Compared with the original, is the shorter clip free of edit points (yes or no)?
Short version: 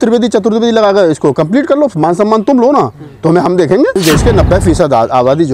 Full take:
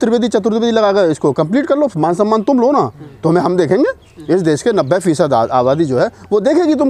no